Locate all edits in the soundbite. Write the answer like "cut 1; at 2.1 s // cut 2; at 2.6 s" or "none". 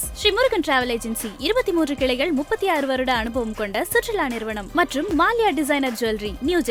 none